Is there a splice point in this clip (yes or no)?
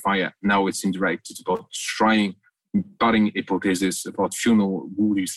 no